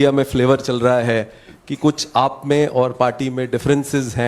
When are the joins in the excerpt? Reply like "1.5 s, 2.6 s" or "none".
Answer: none